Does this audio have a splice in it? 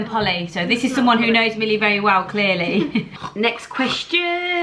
yes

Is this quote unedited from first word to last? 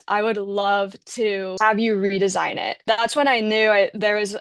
no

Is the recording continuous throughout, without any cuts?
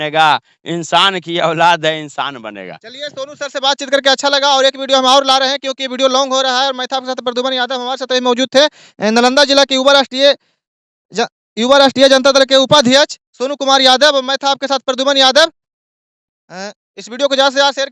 yes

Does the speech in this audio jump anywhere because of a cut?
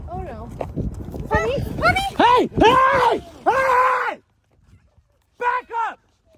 no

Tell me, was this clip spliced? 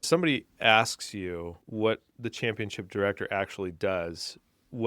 yes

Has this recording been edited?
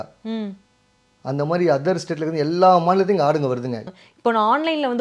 yes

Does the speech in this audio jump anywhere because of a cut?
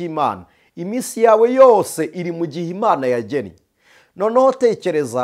no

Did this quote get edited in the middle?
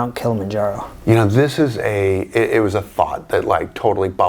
no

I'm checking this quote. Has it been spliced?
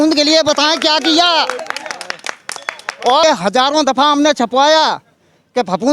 yes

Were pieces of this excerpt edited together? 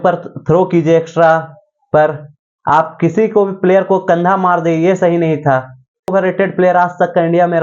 yes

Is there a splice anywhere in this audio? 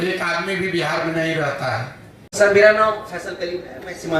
yes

